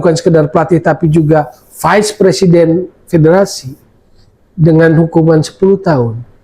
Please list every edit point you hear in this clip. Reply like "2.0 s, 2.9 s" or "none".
none